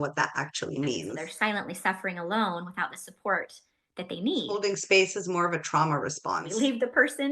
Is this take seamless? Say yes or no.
no